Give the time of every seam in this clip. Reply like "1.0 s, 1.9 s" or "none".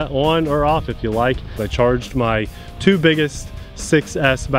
1.6 s